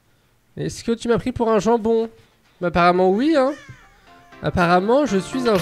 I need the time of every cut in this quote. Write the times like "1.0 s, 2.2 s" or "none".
none